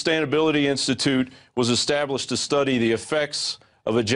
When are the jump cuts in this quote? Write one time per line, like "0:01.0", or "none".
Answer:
0:01.0